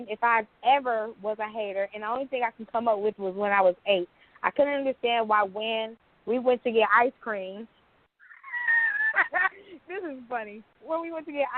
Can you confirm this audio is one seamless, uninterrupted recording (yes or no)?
yes